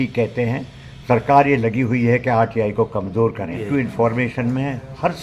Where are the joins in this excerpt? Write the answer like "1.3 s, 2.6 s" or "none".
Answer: 3.6 s